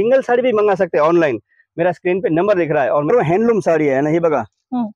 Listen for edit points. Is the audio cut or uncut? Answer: cut